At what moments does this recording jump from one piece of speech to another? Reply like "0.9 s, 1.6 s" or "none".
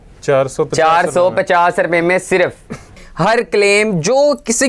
2.9 s